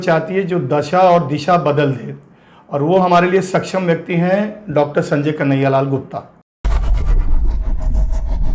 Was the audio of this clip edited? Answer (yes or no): no